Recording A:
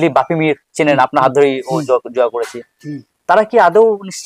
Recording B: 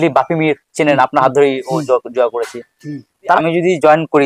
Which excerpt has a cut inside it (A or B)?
B